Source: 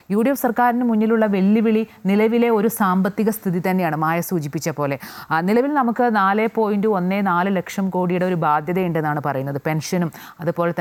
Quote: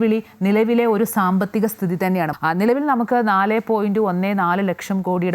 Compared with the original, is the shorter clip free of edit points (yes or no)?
no